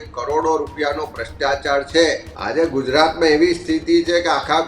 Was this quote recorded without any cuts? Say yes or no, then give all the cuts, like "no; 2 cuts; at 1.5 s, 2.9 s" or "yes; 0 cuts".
no; 1 cut; at 2.3 s